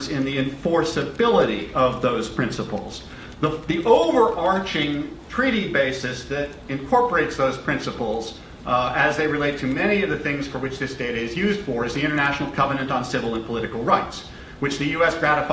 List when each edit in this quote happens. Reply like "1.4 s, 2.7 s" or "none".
8.9 s